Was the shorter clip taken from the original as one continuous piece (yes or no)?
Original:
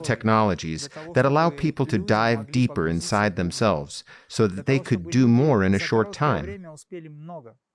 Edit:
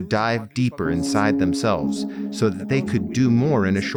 yes